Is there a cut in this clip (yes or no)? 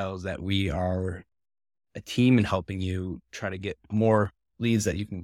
no